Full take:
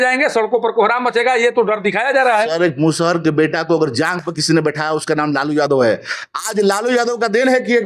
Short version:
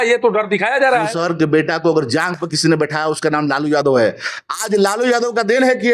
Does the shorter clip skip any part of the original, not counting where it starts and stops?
yes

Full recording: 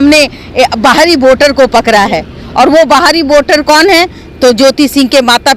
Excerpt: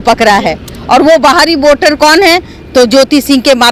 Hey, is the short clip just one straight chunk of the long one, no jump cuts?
yes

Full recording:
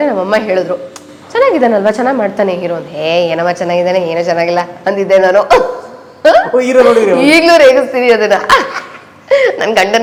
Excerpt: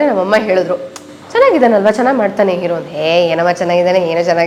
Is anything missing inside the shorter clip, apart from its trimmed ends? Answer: no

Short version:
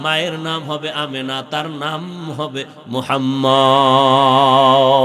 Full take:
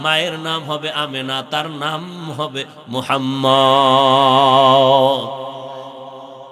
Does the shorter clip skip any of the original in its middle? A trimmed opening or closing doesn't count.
no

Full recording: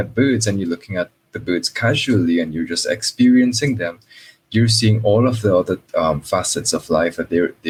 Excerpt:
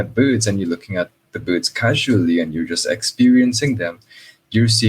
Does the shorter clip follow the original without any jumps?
yes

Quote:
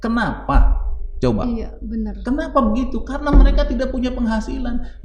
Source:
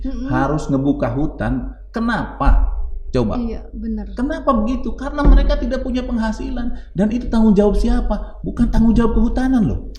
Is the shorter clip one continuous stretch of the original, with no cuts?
yes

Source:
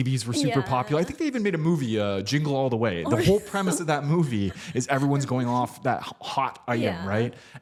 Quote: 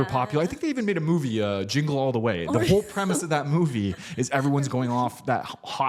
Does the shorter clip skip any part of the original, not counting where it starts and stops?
no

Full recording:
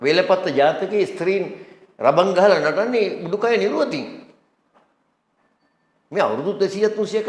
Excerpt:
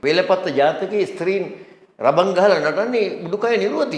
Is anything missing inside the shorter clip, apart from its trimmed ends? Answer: no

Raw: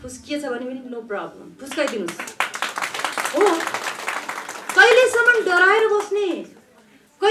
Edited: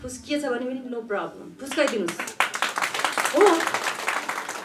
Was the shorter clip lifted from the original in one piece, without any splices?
yes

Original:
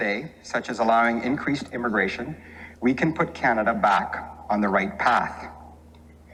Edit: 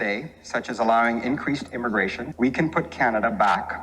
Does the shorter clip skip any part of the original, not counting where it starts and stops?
yes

